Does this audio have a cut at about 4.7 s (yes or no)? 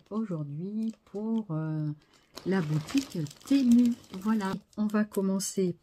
yes